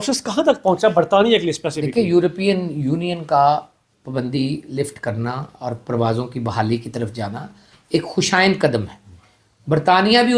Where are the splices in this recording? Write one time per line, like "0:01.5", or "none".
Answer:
none